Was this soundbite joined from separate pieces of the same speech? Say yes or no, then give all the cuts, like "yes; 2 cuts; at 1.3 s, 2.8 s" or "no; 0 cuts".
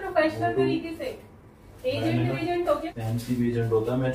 yes; 1 cut; at 2.8 s